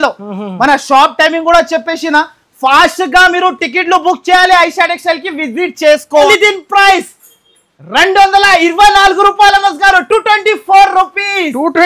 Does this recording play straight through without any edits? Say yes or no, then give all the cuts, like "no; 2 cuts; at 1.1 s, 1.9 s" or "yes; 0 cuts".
no; 1 cut; at 6.3 s